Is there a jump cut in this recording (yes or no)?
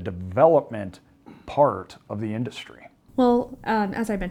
no